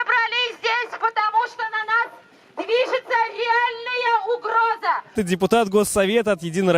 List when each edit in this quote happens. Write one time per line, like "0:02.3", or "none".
0:05.2

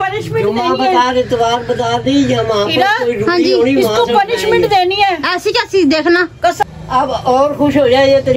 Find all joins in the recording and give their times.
0:06.6

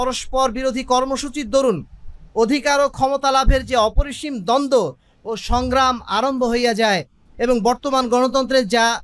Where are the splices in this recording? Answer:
none

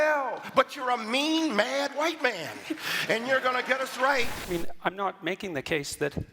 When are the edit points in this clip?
0:04.4

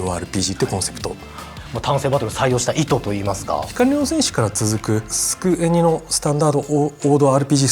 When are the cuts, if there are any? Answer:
0:01.6
0:03.7
0:05.2

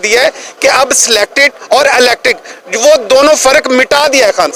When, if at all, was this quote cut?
none

